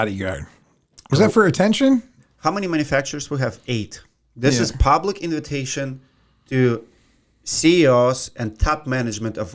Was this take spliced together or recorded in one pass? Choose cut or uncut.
cut